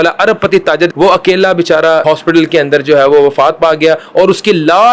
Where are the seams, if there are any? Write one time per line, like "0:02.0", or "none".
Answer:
0:00.9
0:02.1